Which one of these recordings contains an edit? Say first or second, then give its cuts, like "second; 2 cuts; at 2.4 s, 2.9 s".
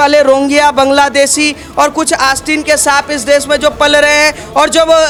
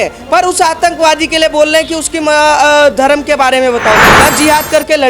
second; 1 cut; at 4.1 s